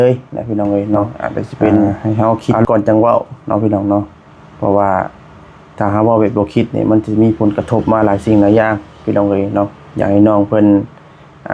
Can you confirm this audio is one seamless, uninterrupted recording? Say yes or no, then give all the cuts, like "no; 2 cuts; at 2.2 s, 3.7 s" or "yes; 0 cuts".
no; 1 cut; at 2.0 s